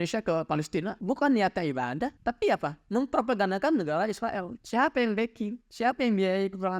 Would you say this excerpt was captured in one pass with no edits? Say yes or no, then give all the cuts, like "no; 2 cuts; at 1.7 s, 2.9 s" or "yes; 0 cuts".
no; 2 cuts; at 1.0 s, 2.2 s